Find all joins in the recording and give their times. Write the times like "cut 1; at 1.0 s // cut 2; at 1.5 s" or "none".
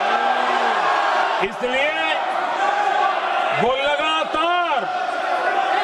none